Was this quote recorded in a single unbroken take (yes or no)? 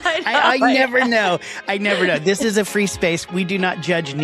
no